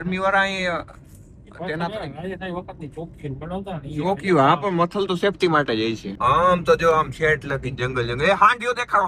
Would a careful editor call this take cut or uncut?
uncut